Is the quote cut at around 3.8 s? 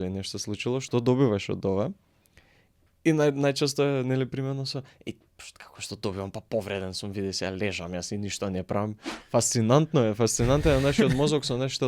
no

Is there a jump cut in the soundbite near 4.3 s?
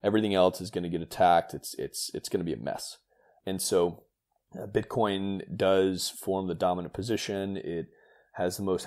no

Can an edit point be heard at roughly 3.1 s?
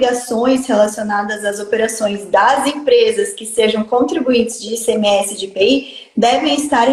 no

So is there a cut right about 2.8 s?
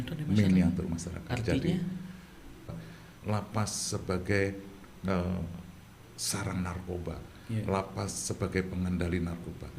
yes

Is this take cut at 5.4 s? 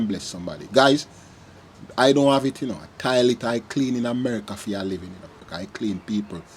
yes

